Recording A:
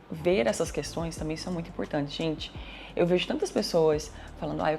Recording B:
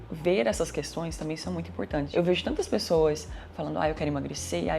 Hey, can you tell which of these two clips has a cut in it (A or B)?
B